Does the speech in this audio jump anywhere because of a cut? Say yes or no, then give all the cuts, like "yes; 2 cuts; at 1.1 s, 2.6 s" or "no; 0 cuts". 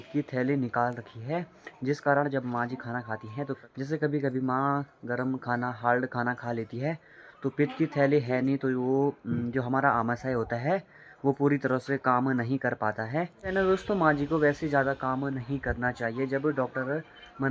yes; 2 cuts; at 3.6 s, 13.3 s